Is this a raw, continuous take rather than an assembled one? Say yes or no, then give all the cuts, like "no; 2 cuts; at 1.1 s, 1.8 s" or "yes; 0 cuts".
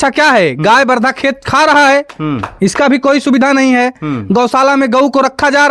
yes; 0 cuts